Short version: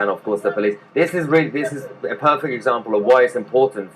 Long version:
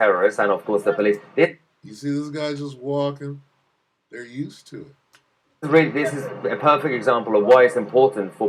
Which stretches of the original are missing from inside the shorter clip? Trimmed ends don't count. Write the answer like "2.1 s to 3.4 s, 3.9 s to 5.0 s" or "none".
1.6 s to 5.6 s